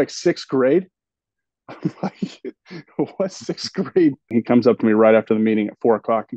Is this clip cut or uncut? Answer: cut